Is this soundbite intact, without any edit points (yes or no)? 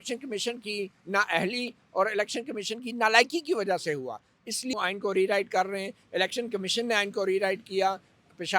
no